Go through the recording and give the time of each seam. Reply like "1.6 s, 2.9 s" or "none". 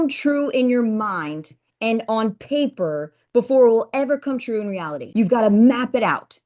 5.0 s